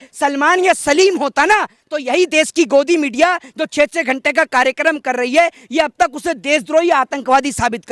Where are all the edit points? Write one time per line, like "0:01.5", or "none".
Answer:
none

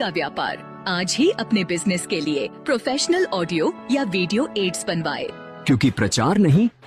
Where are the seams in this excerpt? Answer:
none

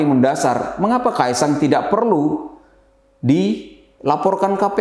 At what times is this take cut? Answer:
none

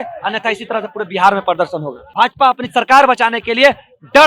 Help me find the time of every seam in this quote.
0:02.0

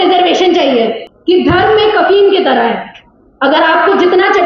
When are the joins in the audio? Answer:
0:01.1

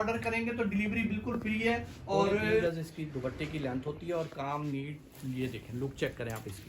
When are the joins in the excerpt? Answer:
0:02.6

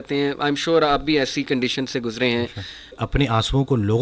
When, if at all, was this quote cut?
0:03.0

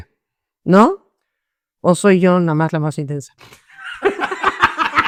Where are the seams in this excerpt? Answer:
none

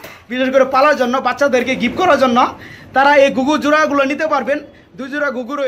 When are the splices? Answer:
none

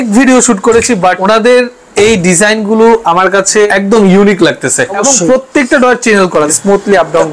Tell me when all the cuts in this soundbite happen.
0:01.2
0:03.7
0:05.0
0:06.5

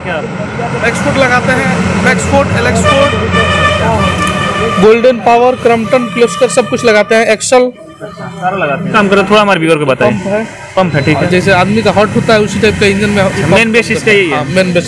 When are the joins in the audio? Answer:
0:08.9

